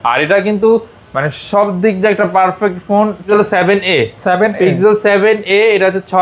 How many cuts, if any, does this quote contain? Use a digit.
1